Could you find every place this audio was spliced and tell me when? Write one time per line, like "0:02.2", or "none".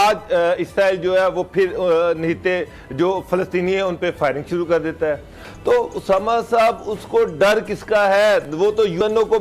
0:05.4